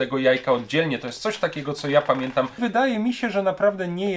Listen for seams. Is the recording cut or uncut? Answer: cut